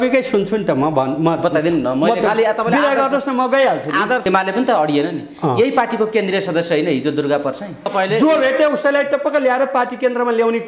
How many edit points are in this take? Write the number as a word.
two